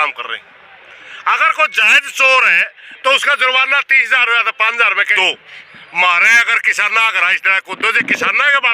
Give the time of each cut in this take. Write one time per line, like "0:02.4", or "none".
0:05.1